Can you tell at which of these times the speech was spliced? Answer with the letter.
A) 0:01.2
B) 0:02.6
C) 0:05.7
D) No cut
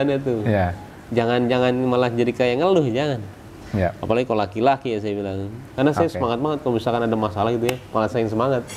C